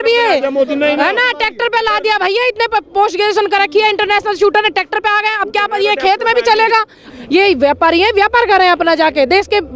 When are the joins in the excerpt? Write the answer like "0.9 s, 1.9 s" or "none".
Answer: 7.1 s